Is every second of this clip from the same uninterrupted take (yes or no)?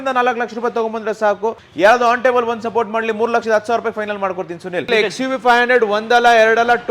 no